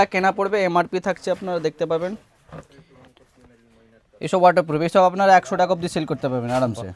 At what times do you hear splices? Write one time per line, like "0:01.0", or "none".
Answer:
none